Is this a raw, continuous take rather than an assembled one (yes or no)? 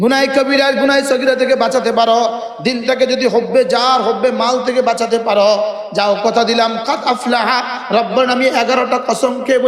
yes